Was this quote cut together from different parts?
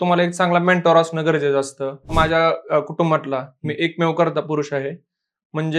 yes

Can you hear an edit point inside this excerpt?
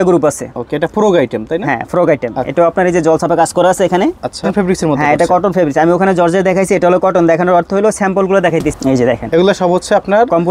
yes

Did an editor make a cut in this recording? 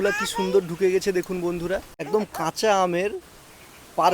yes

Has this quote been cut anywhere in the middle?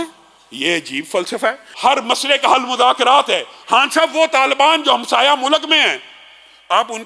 yes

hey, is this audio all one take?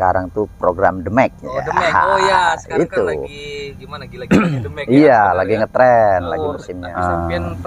no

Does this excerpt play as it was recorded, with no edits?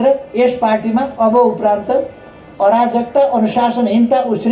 yes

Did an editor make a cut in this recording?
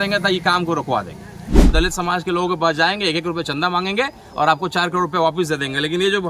yes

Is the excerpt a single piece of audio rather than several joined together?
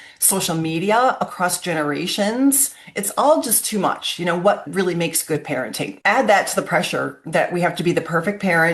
no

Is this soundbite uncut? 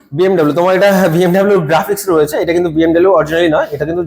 yes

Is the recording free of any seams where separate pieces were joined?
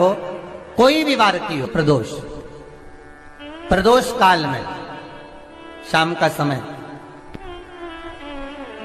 no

